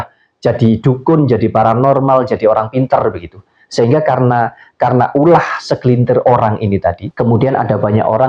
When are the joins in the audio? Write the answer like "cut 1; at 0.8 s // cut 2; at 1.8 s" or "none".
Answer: cut 1; at 7.1 s